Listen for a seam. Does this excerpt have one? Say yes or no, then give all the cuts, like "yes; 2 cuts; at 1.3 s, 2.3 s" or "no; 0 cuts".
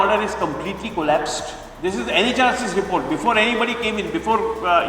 yes; 1 cut; at 1.6 s